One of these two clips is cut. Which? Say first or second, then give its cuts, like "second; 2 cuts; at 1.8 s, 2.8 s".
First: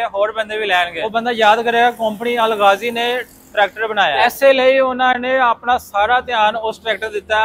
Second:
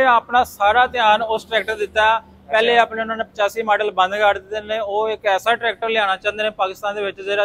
first; 2 cuts; at 1.0 s, 4.1 s